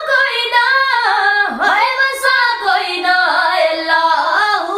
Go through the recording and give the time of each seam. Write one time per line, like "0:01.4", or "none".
none